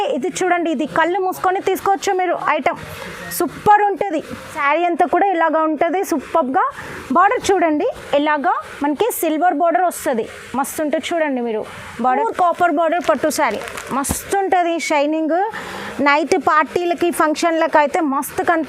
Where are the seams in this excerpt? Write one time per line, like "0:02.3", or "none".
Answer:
0:04.5
0:12.2